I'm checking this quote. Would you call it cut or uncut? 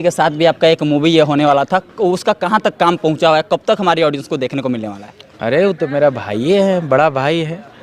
uncut